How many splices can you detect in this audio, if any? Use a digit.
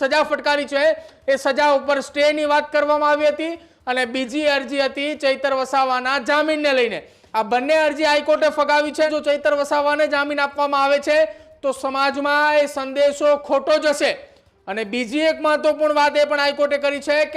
1